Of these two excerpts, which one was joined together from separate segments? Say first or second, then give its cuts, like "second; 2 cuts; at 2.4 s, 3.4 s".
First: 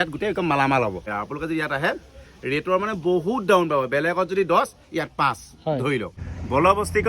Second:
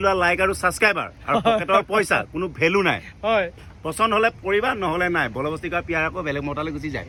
first; 2 cuts; at 1.0 s, 6.2 s